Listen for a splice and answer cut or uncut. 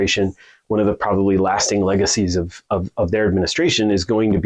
uncut